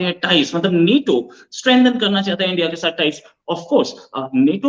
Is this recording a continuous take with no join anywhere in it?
yes; 0 cuts

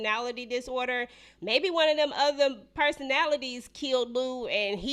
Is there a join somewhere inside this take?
no; 0 cuts

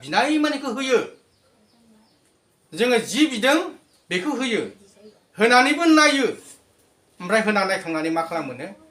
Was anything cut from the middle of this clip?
no; 0 cuts

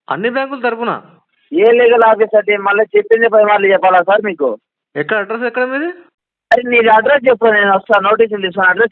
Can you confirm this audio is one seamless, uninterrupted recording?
no; 1 cut; at 6.2 s

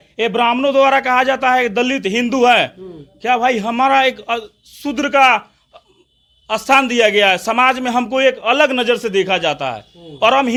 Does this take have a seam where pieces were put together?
no; 0 cuts

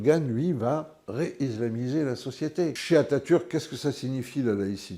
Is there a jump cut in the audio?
yes; 1 cut; at 2.8 s

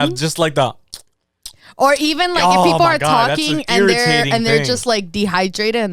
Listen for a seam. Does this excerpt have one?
no; 0 cuts

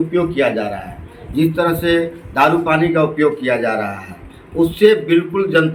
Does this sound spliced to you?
no; 0 cuts

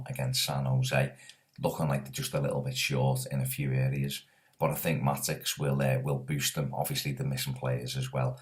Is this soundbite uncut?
yes; 0 cuts

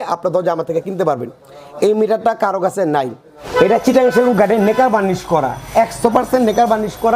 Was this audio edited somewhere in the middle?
yes; 1 cut; at 3.4 s

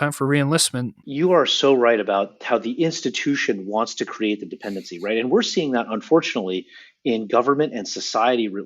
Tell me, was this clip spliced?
yes; 1 cut; at 1.0 s

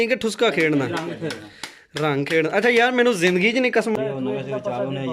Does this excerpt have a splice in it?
yes; 1 cut; at 3.9 s

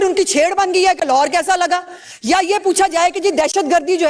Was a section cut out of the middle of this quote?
yes; 1 cut; at 2.1 s

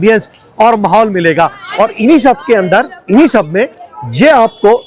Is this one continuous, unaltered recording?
yes; 0 cuts

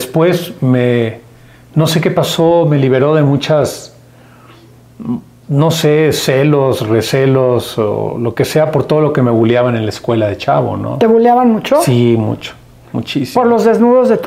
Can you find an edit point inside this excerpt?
no; 0 cuts

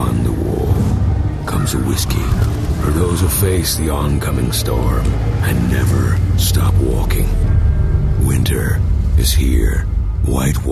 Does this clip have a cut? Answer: no; 0 cuts

